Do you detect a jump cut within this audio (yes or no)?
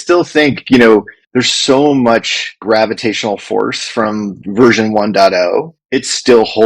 yes